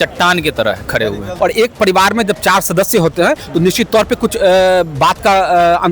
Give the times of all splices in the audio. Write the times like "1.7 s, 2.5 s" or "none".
1.3 s